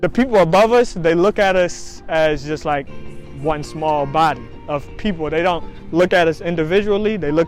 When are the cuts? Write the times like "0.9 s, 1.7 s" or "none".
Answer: none